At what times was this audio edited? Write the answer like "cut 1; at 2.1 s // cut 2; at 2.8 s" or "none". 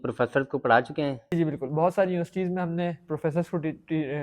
cut 1; at 1.3 s